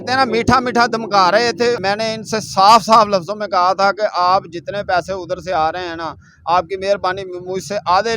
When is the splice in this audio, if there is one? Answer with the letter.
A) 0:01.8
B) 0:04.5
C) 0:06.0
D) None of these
A